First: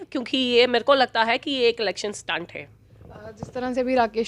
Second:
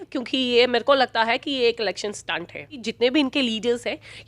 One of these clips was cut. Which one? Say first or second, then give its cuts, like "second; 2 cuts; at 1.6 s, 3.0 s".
second; 1 cut; at 2.8 s